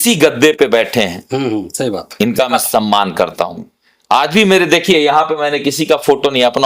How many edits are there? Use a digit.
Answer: 0